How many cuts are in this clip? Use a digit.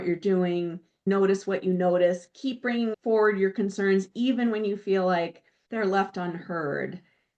1